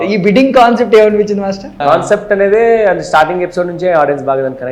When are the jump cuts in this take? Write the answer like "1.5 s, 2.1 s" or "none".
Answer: 1.8 s